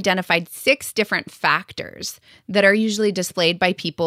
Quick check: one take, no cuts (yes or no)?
yes